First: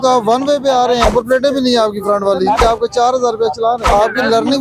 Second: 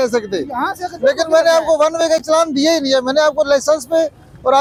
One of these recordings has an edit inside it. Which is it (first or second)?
first